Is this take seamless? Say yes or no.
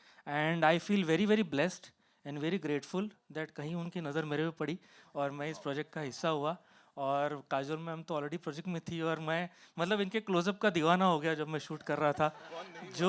yes